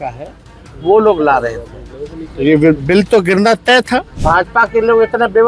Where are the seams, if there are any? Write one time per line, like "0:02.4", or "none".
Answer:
0:04.2